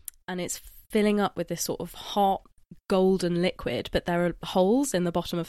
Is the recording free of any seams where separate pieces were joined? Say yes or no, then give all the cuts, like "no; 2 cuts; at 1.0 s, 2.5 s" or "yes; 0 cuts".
yes; 0 cuts